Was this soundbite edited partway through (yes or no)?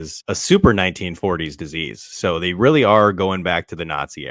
no